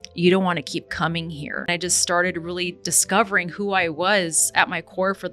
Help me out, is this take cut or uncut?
cut